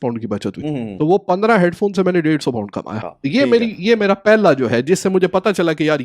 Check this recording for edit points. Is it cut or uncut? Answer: uncut